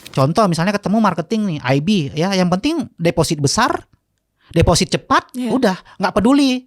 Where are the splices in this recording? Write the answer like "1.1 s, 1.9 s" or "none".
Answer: none